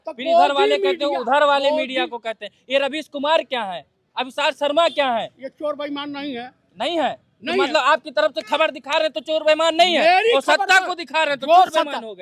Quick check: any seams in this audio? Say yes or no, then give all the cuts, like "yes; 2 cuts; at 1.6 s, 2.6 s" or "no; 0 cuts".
no; 0 cuts